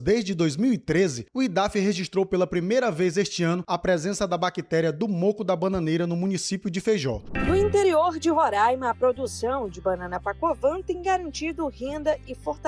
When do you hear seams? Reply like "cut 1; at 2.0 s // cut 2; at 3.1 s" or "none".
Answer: cut 1; at 7.3 s